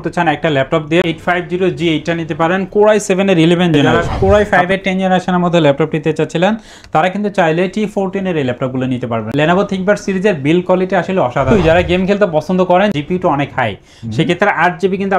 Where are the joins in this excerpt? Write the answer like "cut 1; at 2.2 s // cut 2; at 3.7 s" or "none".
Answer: cut 1; at 1.0 s // cut 2; at 4.0 s // cut 3; at 11.7 s // cut 4; at 12.9 s